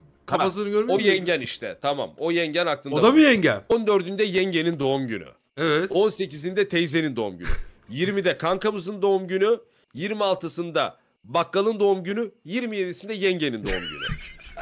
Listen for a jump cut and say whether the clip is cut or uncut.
cut